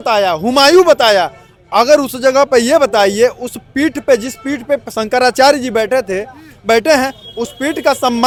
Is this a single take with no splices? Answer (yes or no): yes